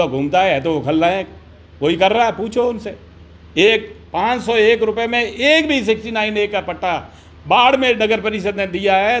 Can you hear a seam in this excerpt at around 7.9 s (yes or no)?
no